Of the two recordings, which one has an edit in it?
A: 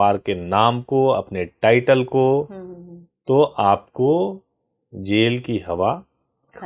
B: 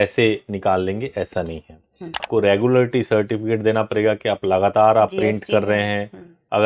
B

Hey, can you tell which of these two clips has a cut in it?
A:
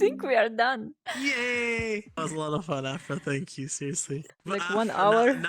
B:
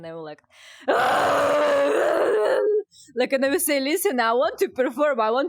A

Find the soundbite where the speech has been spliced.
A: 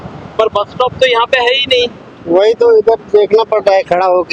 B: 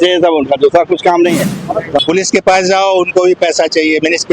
B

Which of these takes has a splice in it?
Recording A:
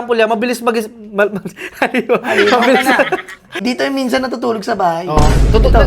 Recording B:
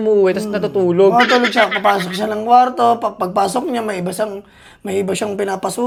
A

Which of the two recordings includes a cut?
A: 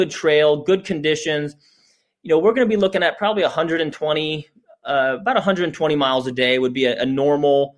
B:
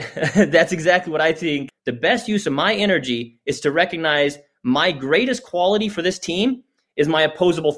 B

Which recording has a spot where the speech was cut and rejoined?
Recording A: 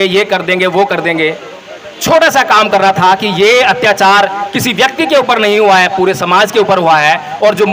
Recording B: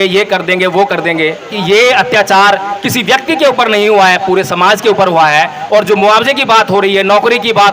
B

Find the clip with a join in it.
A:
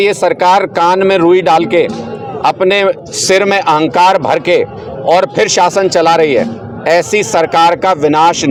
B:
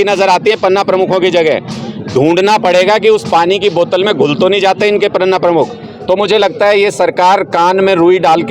B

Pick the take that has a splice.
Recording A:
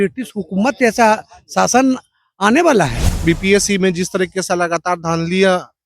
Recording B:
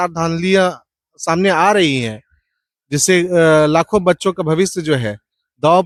A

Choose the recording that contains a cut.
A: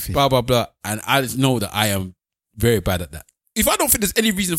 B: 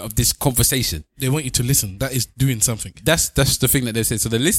A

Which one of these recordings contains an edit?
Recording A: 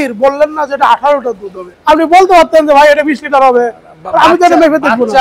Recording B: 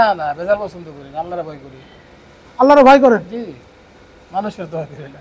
A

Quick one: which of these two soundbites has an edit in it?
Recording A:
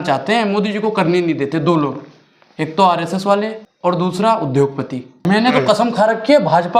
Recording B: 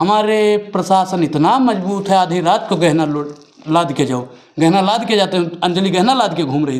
A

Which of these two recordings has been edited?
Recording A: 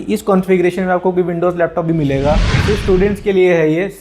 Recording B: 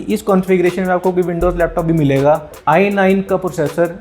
A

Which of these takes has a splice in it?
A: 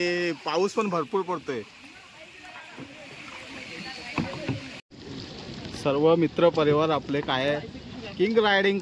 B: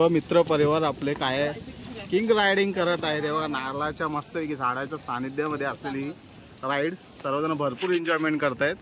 A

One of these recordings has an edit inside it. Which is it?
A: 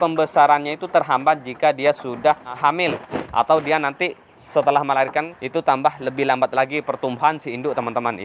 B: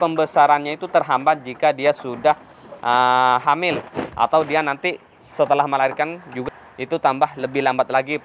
A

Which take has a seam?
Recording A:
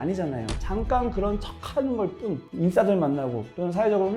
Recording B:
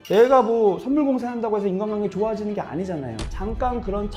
A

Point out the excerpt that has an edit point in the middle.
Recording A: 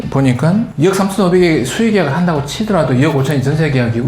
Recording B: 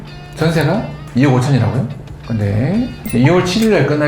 B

